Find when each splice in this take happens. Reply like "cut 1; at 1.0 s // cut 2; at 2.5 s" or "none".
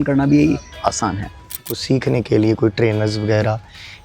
cut 1; at 1.7 s